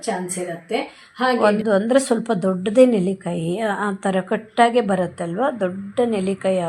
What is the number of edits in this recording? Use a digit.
1